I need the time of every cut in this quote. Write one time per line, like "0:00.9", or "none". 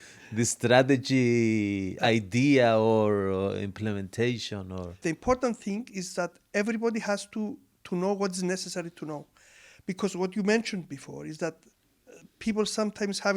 0:05.0